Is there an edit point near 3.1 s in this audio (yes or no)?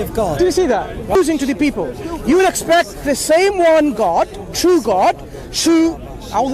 no